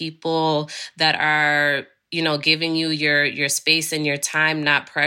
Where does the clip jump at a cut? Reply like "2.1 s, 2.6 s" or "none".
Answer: none